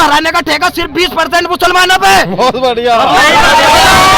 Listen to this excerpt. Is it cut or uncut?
uncut